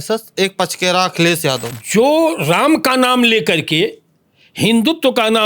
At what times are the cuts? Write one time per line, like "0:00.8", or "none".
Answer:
0:01.7

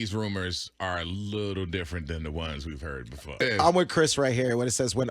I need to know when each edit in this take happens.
0:03.4

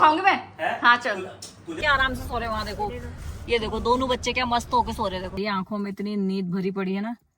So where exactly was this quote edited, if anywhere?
0:01.7
0:05.3

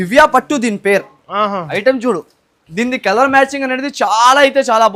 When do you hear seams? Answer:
none

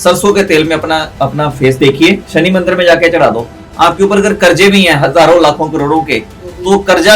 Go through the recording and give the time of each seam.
0:01.1
0:02.2

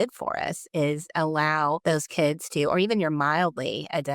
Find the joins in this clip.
0:01.8

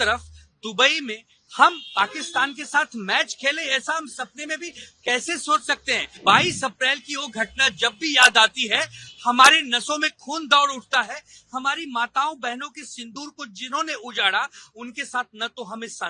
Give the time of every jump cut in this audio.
0:06.1

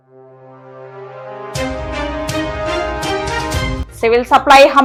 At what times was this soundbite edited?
none

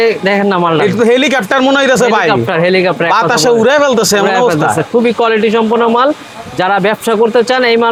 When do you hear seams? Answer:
none

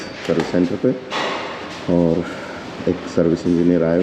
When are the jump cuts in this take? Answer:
none

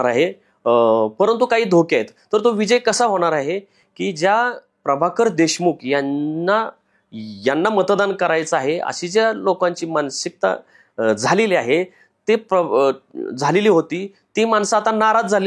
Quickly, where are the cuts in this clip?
none

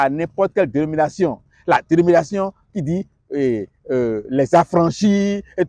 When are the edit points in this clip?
none

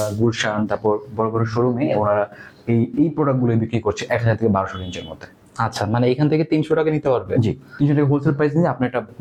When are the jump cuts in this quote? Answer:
none

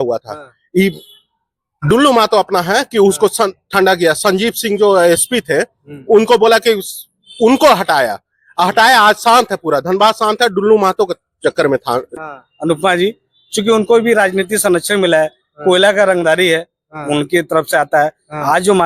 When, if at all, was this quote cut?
0:12.2

